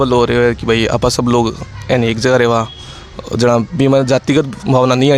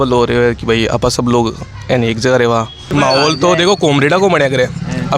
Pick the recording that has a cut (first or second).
second